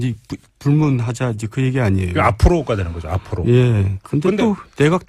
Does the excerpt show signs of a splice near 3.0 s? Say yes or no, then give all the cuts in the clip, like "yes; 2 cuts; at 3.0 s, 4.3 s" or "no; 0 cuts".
no; 1 cut; at 1.6 s